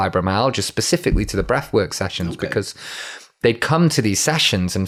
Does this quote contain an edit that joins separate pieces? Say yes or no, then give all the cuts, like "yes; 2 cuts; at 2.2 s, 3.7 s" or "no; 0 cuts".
no; 0 cuts